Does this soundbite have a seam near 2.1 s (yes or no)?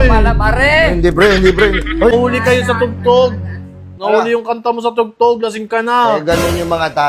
yes